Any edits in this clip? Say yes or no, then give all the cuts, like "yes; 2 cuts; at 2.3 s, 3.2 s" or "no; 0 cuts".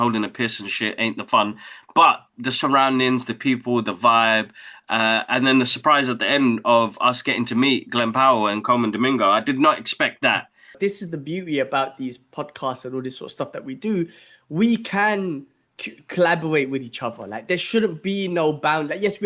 yes; 1 cut; at 10.6 s